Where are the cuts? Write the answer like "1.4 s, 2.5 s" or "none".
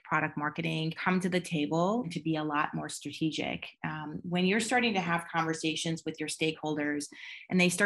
1.0 s, 2.1 s